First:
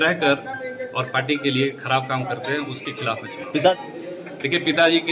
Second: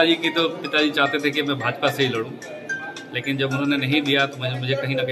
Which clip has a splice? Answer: first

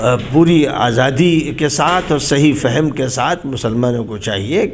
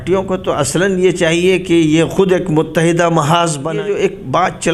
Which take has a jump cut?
second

